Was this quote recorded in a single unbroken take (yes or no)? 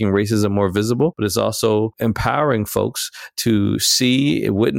no